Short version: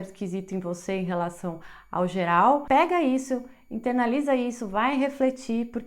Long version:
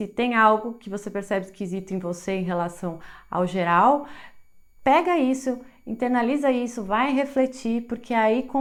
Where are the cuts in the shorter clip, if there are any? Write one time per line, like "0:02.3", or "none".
0:02.6